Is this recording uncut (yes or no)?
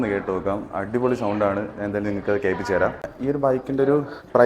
no